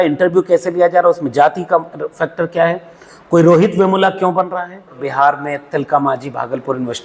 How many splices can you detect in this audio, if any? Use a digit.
1